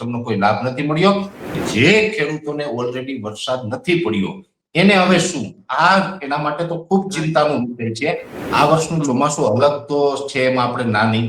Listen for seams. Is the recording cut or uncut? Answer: cut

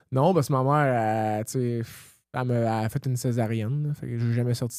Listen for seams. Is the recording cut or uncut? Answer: uncut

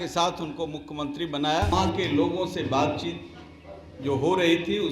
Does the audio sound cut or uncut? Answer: cut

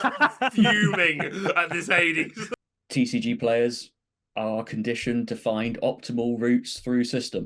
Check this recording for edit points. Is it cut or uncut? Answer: cut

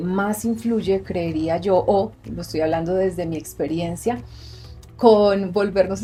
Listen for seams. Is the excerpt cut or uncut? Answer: uncut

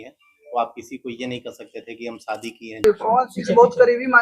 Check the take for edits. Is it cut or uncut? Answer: cut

